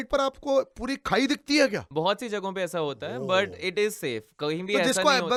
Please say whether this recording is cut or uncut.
uncut